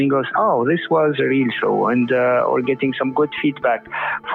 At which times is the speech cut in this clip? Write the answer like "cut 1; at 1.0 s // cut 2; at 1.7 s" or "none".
none